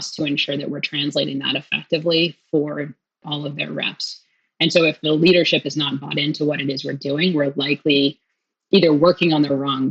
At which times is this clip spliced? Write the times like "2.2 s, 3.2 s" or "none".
3.2 s, 5.0 s